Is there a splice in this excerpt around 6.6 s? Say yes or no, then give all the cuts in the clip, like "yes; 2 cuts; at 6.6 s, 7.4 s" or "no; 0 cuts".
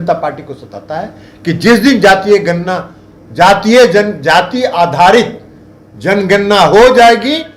no; 0 cuts